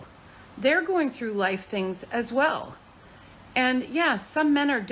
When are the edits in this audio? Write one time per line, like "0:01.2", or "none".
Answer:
none